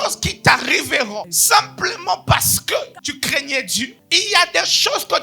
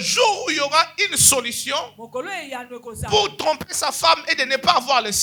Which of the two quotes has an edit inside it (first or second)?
first